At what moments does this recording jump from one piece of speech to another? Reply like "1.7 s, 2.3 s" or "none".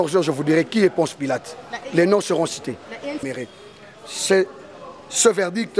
3.2 s